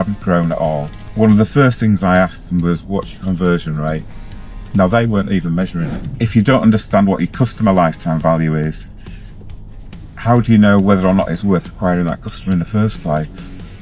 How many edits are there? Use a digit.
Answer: 2